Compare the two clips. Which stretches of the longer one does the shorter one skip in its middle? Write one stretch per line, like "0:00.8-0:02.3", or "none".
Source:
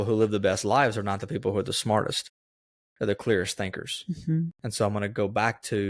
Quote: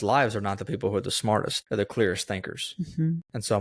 0:02.2-0:02.9